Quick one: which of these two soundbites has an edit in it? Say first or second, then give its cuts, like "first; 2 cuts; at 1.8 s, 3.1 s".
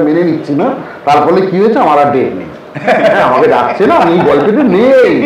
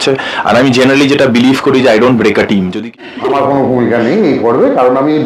second; 1 cut; at 3.1 s